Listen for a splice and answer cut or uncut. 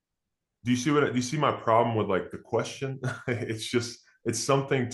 uncut